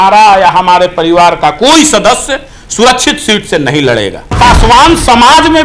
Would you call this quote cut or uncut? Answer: cut